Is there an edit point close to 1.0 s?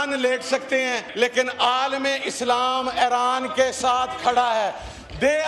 yes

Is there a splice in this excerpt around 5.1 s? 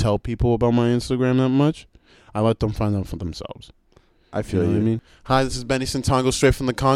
yes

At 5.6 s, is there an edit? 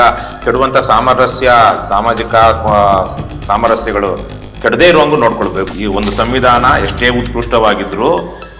yes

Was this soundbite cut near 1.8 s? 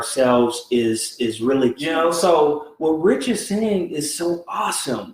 yes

